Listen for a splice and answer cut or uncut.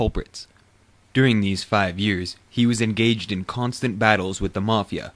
cut